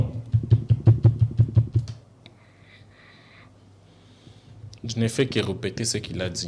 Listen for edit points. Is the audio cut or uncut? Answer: uncut